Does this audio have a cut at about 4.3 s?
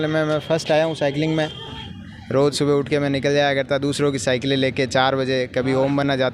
no; 1 cut; at 1.7 s

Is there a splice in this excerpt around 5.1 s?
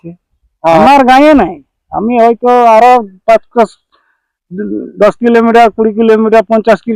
no; 0 cuts

